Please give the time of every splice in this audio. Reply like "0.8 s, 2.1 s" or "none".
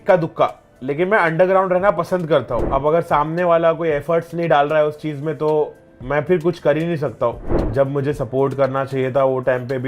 2.6 s, 7.5 s